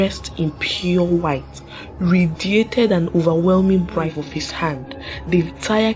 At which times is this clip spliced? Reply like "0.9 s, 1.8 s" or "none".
4.2 s